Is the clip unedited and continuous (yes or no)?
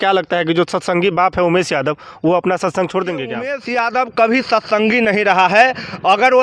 no